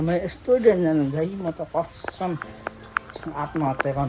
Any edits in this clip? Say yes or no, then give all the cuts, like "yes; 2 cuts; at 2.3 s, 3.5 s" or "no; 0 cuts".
no; 0 cuts